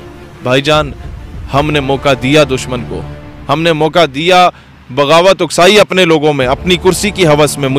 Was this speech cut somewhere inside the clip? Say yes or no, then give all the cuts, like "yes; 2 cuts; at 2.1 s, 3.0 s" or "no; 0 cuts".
no; 0 cuts